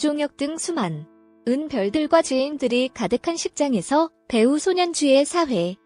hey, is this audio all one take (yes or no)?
yes